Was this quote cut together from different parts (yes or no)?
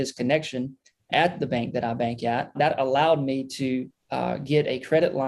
yes